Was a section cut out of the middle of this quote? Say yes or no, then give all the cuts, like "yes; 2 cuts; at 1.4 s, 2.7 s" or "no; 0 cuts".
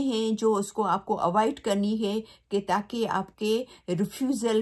no; 0 cuts